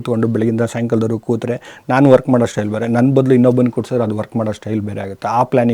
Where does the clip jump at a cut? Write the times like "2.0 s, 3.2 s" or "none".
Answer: none